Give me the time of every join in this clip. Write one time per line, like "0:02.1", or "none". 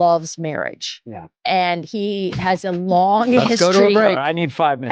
none